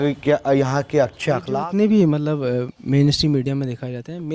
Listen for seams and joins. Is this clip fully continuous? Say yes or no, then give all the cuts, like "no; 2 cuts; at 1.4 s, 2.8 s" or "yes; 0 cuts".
no; 1 cut; at 1.5 s